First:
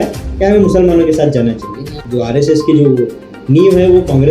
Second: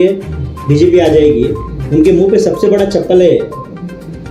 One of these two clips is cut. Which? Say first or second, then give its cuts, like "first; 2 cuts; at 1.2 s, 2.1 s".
first; 1 cut; at 1.9 s